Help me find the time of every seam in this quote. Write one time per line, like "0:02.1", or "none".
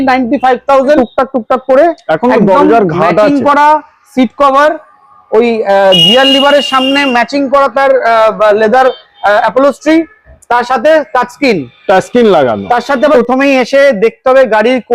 0:01.0
0:13.1